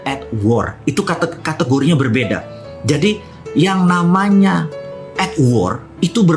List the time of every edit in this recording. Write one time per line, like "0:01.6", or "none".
0:03.3